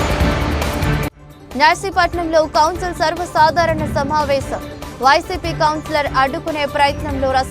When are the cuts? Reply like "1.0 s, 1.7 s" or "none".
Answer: 1.0 s